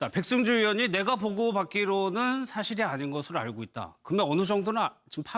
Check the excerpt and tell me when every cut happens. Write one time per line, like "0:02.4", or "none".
0:01.2